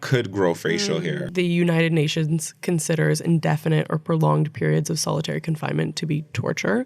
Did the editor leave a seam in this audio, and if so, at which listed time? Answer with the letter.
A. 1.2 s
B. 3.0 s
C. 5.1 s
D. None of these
A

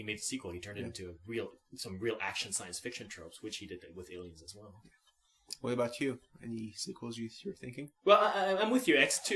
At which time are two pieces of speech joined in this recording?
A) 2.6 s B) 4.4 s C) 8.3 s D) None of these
D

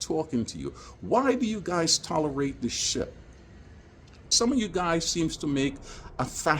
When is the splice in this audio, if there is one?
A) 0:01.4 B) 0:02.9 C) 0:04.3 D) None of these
C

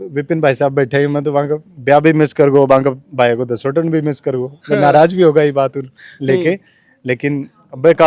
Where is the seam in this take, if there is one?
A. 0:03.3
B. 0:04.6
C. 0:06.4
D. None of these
D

